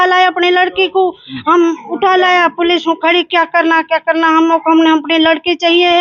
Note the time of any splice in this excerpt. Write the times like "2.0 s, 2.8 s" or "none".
none